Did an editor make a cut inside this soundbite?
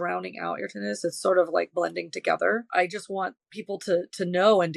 yes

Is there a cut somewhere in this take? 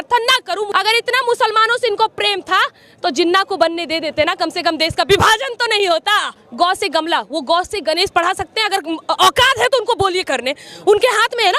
no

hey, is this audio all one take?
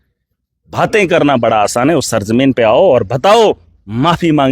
yes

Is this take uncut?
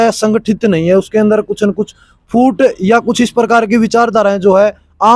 yes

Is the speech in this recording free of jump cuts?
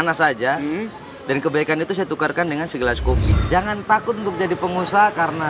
no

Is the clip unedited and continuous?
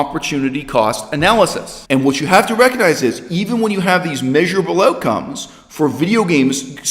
no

